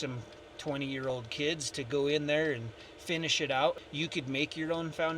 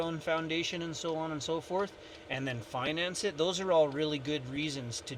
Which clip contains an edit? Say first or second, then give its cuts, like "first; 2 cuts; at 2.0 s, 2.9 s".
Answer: first; 1 cut; at 3.8 s